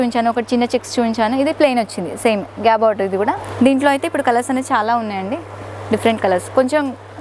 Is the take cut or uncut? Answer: cut